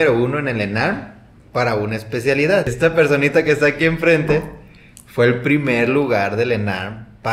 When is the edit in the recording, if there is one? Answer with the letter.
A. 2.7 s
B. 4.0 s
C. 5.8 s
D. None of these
A